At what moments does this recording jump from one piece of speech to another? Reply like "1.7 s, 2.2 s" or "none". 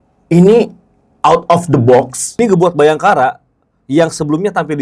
2.4 s